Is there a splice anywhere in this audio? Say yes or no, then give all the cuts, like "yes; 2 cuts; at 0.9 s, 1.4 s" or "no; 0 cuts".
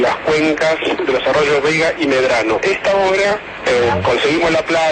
yes; 1 cut; at 2.6 s